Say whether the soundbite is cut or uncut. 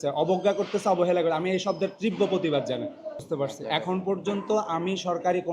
cut